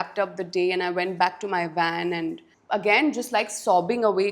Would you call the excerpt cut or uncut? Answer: cut